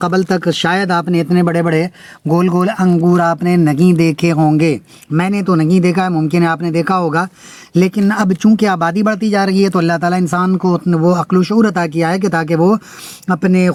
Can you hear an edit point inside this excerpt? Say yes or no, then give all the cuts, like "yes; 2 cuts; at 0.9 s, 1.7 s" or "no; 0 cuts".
no; 0 cuts